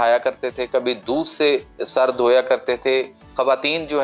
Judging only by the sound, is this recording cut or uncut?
uncut